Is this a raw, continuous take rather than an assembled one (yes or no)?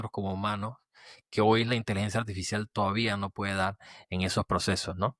yes